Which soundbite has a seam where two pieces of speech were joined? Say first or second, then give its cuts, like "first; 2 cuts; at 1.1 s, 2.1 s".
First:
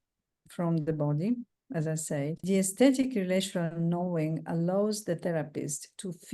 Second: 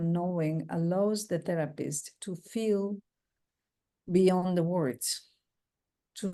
first; 1 cut; at 2.4 s